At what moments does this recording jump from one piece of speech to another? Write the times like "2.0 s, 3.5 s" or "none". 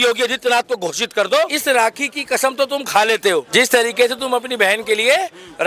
1.6 s, 3.5 s

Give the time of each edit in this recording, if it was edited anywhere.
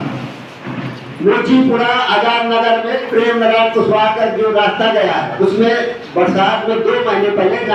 none

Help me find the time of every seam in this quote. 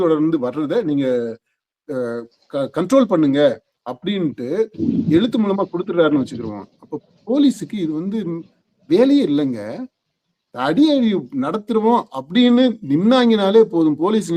none

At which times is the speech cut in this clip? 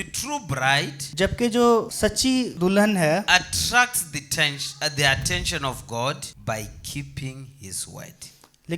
1.0 s, 2.2 s, 6.3 s

